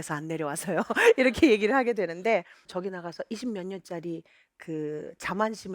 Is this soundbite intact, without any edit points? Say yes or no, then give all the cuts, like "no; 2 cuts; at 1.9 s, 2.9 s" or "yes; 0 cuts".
no; 1 cut; at 2.6 s